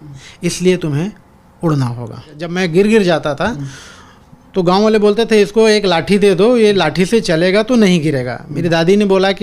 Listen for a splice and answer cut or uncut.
cut